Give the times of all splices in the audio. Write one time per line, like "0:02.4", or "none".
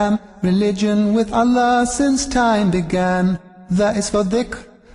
0:03.5